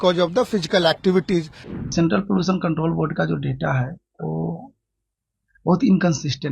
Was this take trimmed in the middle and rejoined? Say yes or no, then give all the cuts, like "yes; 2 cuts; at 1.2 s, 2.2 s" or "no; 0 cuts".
yes; 1 cut; at 1.8 s